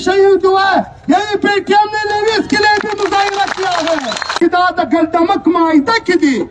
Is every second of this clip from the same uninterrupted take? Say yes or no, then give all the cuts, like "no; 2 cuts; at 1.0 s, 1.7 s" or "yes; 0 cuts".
no; 1 cut; at 4.4 s